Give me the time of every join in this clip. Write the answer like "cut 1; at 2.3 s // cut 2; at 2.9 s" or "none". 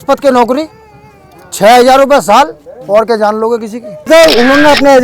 cut 1; at 4.1 s